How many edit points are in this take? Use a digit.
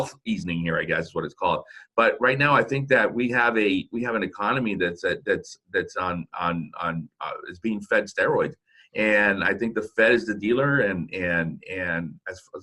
0